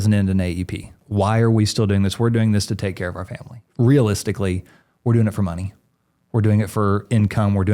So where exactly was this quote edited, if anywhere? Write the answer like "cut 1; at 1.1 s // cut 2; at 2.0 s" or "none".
cut 1; at 0.9 s // cut 2; at 3.6 s